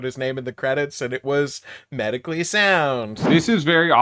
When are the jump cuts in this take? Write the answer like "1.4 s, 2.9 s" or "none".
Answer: 2.9 s